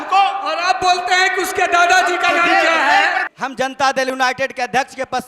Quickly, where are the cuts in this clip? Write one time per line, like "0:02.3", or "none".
0:03.2